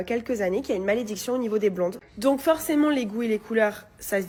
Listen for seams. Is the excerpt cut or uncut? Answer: uncut